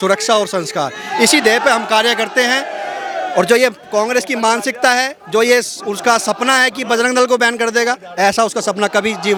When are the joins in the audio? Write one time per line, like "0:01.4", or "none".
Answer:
none